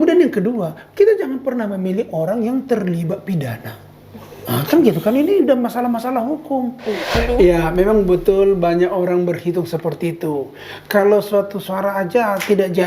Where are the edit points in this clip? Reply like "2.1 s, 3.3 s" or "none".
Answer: 7.0 s